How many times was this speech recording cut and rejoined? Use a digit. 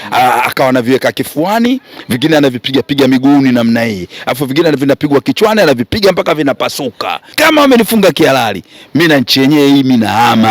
1